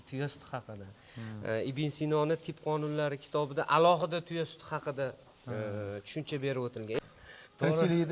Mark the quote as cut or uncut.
cut